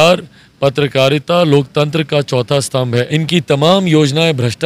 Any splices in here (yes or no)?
yes